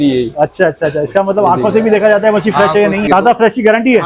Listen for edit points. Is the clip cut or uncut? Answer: cut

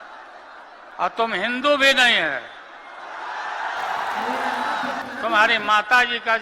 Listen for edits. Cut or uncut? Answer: cut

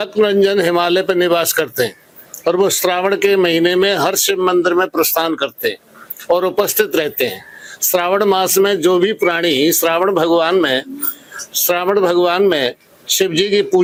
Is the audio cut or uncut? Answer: uncut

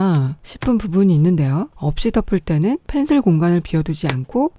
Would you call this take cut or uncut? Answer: cut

